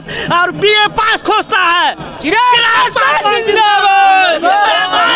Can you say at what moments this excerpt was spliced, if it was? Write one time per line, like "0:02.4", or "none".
none